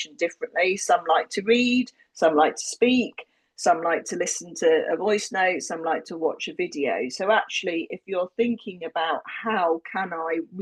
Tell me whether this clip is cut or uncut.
uncut